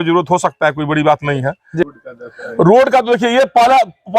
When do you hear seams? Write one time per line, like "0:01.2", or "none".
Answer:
0:01.8